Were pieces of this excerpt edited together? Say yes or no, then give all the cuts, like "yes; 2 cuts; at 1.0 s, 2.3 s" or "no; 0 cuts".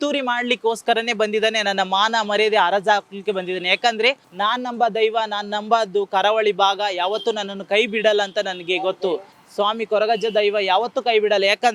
yes; 1 cut; at 4.3 s